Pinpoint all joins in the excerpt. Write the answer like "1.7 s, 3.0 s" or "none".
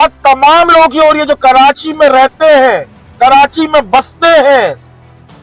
none